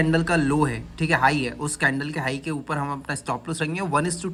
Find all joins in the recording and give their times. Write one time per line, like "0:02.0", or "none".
none

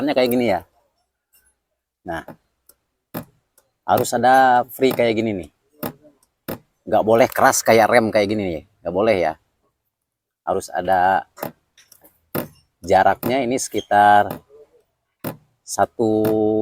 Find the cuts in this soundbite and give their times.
none

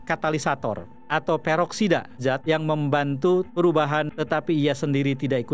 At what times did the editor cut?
0:02.2
0:04.1

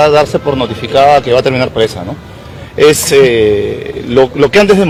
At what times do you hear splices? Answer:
none

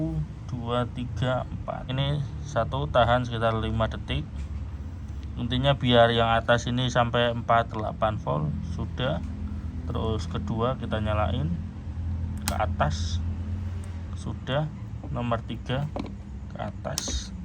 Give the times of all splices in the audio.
0:01.9

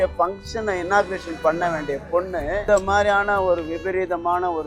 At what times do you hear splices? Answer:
0:02.6

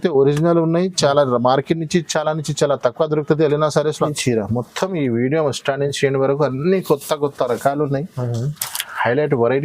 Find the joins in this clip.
0:04.1

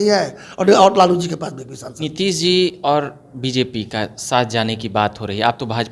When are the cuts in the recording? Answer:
0:02.1

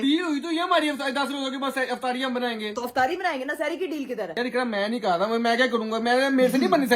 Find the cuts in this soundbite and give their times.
none

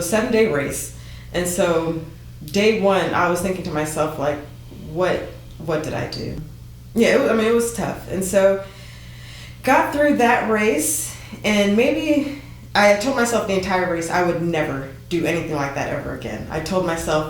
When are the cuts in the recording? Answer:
0:06.4

